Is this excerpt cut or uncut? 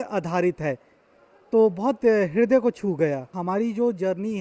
uncut